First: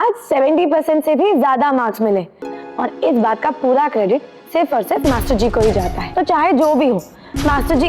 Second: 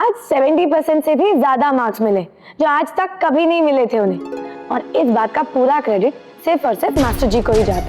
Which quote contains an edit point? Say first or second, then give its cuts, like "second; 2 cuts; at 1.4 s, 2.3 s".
first; 2 cuts; at 2.4 s, 6.0 s